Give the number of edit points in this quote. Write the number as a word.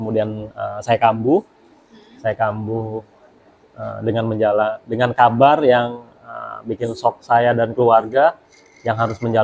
zero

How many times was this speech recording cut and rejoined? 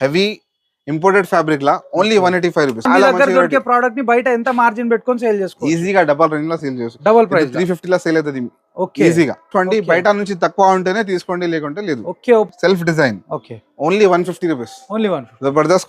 three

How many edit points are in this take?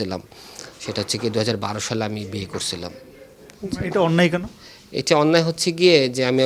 zero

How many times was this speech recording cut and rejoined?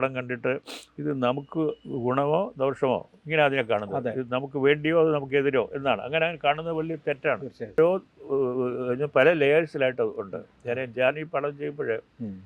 one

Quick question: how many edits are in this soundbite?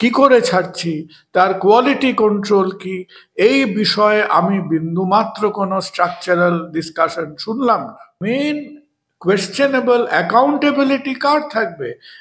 one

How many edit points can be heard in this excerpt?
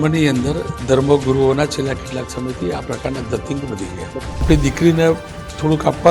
one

